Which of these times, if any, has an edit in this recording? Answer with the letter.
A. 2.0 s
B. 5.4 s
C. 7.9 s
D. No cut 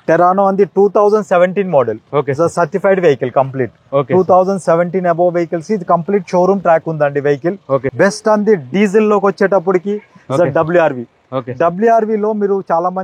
C